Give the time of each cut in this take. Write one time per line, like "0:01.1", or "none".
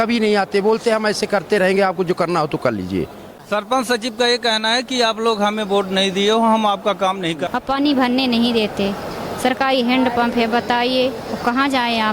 0:03.3
0:07.4